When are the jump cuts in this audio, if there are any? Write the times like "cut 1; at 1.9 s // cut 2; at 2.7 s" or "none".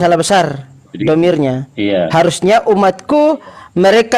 none